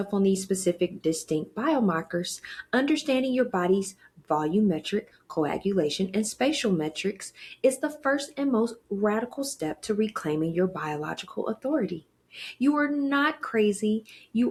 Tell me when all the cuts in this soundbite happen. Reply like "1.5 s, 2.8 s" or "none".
none